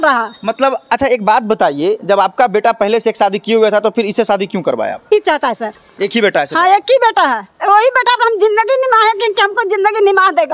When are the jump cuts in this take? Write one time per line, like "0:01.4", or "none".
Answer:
0:05.1